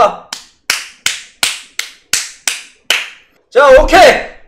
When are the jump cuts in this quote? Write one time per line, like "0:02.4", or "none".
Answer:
none